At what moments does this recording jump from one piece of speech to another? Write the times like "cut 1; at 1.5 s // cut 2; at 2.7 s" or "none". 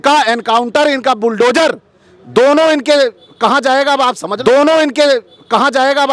cut 1; at 4.3 s